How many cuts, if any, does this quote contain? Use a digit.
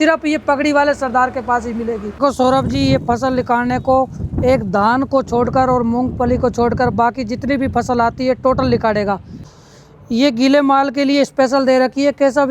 2